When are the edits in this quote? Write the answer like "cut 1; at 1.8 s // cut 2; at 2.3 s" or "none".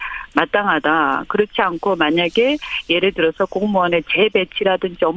cut 1; at 3.1 s